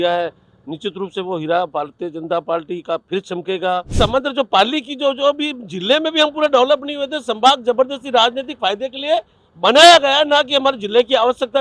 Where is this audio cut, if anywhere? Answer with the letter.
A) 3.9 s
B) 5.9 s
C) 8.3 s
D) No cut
A